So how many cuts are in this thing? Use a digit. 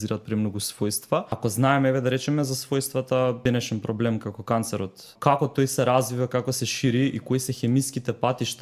3